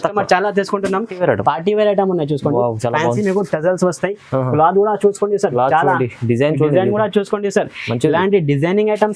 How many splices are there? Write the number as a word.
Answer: one